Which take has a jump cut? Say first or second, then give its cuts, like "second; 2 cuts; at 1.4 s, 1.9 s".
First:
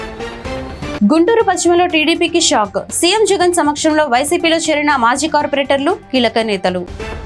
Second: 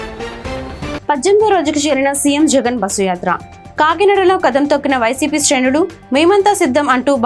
second; 1 cut; at 1.0 s